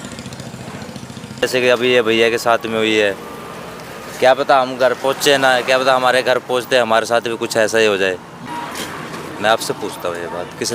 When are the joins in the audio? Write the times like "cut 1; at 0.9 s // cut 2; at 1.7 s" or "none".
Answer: cut 1; at 1.4 s // cut 2; at 8.5 s